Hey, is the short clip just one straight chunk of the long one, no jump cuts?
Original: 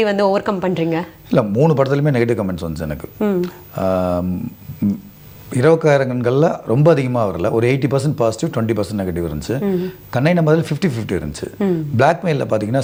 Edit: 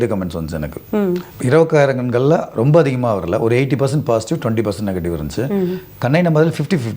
no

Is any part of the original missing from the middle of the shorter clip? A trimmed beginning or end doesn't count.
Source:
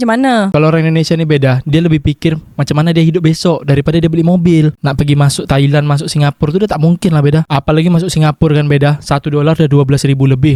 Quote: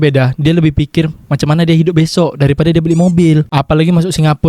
yes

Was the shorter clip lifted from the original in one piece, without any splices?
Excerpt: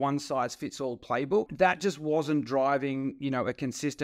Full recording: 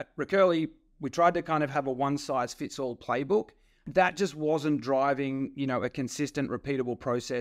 no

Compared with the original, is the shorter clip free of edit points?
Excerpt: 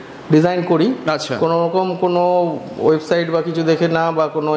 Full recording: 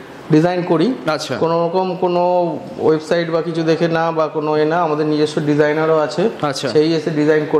yes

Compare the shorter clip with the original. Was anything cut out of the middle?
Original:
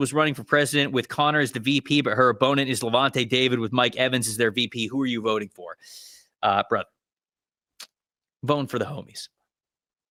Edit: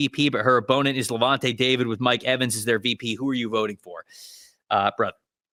no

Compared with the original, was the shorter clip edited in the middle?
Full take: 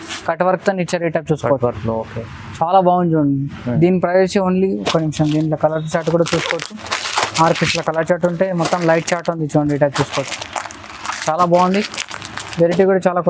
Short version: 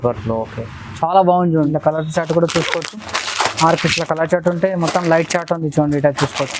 yes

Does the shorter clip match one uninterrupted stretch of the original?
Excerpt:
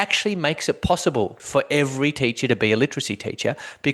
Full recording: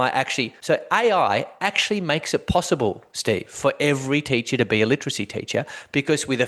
no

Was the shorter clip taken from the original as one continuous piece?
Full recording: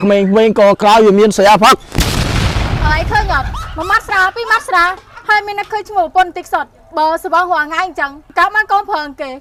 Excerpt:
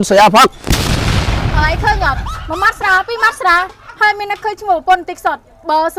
yes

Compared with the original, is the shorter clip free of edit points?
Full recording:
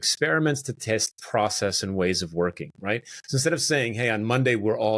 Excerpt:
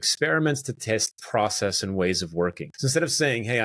no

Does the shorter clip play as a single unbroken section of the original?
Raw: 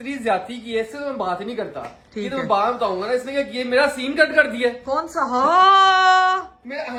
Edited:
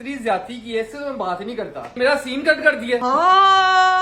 no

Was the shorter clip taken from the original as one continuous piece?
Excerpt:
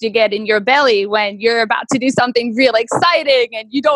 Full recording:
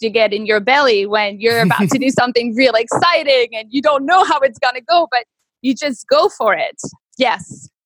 yes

